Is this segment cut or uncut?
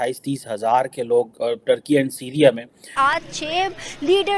cut